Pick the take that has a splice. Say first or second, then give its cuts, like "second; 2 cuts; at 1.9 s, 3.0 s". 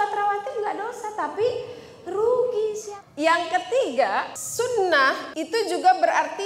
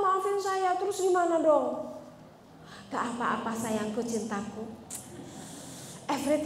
first; 3 cuts; at 2.8 s, 4.4 s, 5.3 s